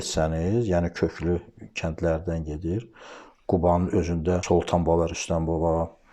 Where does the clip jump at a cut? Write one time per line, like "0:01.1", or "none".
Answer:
0:04.4